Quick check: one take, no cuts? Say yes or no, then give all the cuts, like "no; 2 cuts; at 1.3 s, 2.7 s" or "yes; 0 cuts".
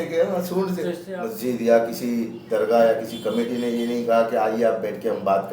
no; 1 cut; at 1.1 s